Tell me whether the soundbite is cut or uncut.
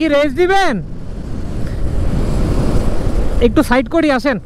uncut